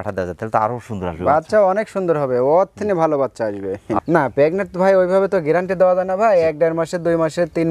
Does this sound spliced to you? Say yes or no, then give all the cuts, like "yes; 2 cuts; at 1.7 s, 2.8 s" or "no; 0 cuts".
yes; 1 cut; at 4.0 s